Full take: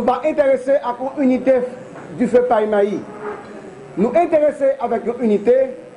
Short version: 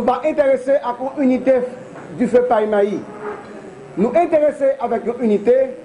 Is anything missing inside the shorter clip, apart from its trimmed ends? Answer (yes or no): no